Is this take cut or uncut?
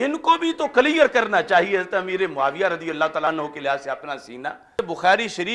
cut